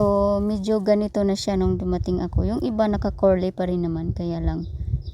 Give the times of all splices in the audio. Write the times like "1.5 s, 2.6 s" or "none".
0.9 s